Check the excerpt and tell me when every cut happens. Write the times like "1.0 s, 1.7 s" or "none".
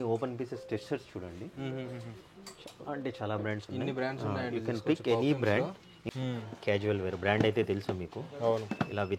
6.0 s